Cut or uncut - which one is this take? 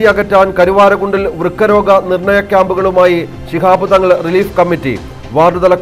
uncut